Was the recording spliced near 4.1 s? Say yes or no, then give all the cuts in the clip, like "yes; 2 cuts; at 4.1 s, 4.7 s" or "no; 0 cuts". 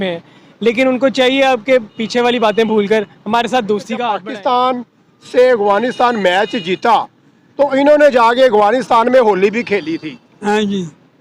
yes; 1 cut; at 4.1 s